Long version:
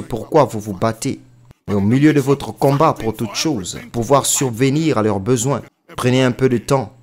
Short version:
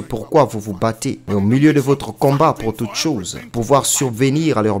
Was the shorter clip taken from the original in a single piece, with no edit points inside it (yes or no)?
no